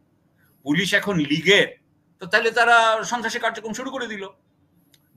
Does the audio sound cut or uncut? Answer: uncut